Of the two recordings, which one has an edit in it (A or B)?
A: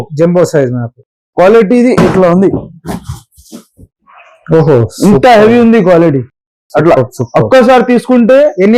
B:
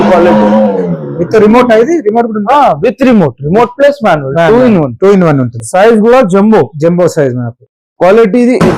B